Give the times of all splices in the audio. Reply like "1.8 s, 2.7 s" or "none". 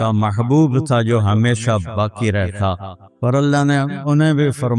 none